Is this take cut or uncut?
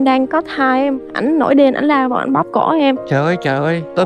cut